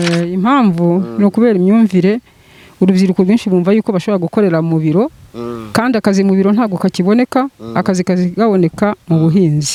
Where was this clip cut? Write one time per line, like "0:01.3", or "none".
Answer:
none